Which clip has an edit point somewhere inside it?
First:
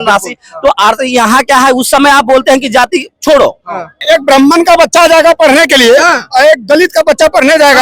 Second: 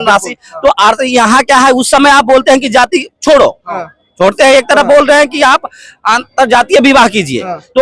first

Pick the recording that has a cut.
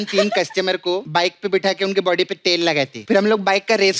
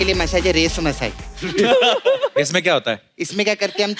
first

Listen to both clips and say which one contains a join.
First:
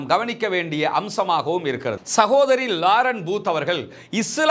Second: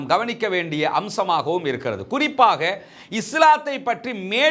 first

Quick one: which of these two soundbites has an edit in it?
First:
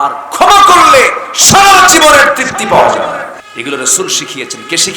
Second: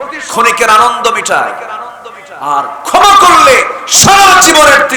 first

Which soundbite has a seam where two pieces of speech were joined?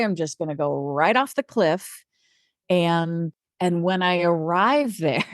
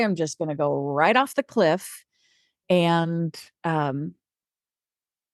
first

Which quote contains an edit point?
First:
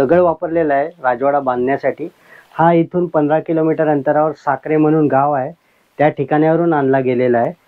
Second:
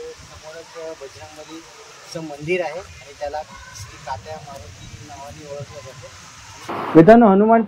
second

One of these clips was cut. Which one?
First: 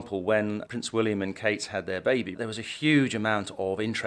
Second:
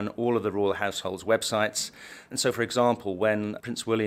first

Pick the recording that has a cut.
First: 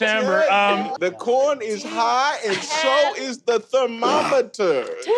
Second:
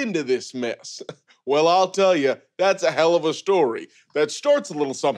first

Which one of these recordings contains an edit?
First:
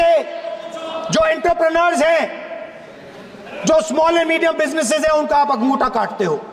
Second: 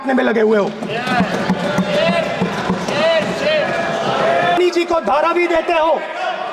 second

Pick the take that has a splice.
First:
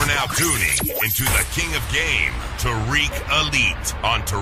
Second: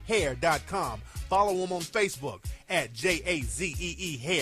second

